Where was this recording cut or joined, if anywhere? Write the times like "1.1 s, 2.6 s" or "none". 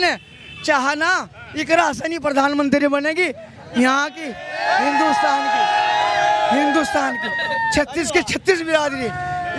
none